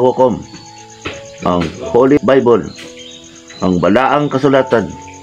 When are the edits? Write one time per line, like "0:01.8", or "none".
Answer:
0:02.2